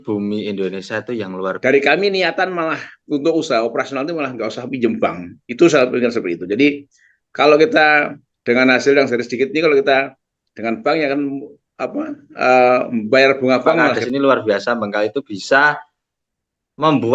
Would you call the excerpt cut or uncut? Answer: cut